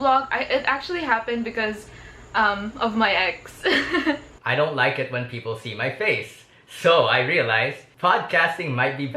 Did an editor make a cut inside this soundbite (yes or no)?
yes